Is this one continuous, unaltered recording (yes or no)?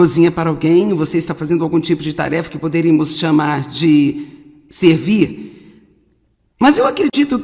yes